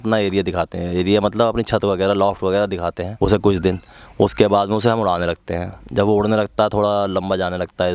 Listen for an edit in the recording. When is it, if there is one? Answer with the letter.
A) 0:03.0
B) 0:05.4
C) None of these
A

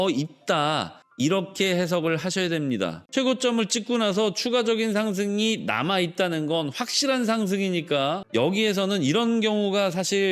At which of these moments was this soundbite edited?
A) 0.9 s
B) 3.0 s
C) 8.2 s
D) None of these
B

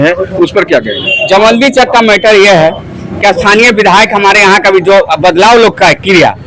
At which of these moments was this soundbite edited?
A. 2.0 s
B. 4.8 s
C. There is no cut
C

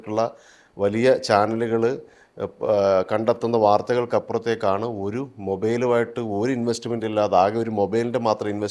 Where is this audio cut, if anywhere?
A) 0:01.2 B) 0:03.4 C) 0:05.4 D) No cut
D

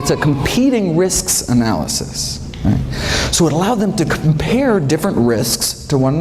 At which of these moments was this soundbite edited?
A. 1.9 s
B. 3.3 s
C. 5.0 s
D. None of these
B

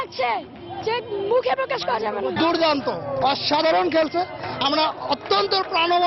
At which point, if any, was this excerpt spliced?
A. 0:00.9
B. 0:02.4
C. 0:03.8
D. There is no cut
B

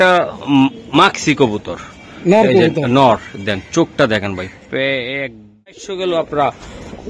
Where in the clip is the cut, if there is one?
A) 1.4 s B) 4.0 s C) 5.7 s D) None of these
C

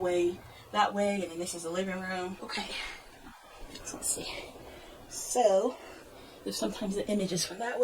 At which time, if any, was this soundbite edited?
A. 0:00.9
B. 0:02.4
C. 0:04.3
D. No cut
B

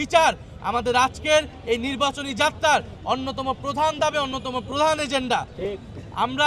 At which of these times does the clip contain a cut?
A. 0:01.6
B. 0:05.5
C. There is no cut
C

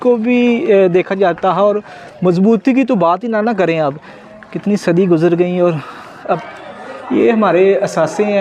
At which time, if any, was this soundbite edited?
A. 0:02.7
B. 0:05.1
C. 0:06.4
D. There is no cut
C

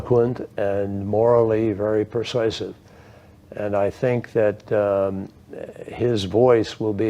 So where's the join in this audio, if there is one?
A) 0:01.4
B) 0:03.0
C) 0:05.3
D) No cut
B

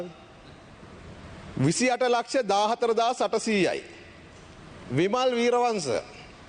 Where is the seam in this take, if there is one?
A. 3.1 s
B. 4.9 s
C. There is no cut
C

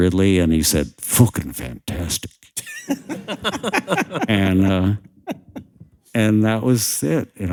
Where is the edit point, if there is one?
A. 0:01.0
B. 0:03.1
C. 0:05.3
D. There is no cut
D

